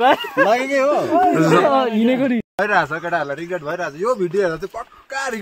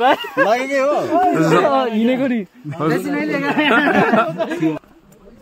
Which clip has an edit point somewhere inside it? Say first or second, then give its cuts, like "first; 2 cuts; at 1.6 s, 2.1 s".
first; 1 cut; at 2.6 s